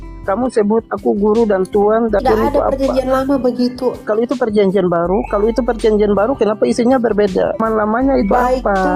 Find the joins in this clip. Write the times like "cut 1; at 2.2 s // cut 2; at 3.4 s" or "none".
cut 1; at 2.2 s // cut 2; at 4.0 s // cut 3; at 7.6 s